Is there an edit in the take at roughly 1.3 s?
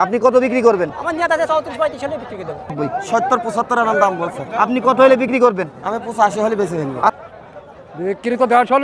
no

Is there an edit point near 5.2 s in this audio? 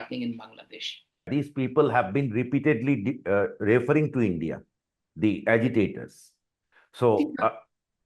no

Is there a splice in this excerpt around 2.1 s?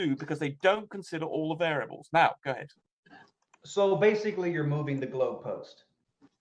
no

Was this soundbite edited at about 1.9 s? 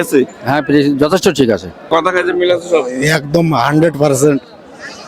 yes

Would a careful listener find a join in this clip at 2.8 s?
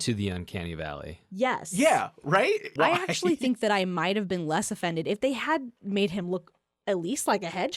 yes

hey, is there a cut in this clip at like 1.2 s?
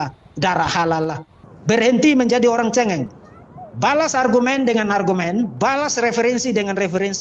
yes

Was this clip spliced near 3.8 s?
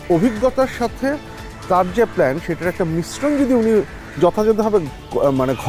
no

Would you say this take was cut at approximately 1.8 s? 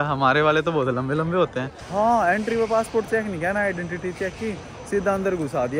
yes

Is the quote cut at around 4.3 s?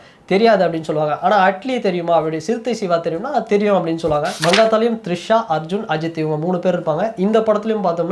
yes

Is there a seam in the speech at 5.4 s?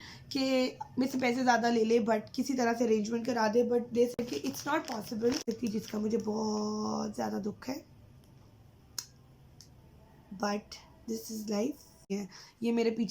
yes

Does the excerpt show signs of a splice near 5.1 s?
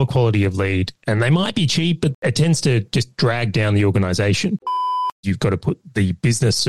yes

